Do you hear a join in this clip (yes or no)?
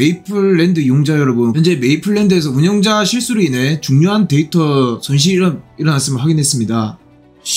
yes